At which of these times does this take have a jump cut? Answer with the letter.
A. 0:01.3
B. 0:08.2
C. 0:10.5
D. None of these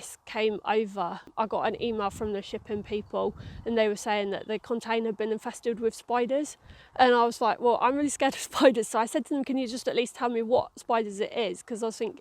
A